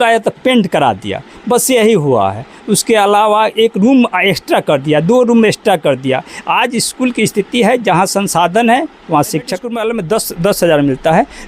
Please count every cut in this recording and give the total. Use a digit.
1